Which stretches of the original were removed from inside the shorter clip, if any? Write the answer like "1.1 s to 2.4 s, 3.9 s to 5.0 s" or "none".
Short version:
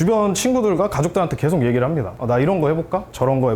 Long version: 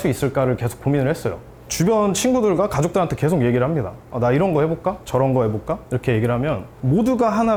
3.9 s to 4.0 s